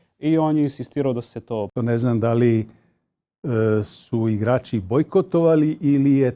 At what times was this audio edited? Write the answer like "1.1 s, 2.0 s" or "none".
1.7 s